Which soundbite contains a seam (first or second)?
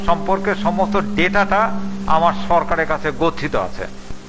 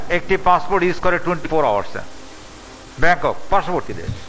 second